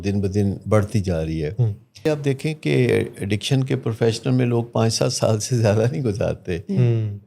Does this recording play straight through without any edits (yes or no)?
no